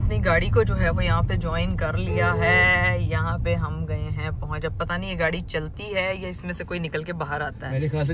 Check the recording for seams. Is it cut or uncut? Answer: uncut